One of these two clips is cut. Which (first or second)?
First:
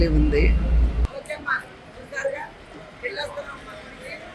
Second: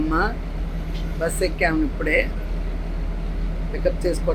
first